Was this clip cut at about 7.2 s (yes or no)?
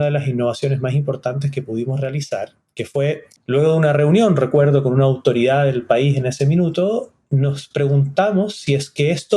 no